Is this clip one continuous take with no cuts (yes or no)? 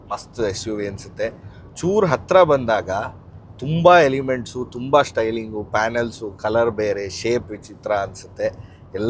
yes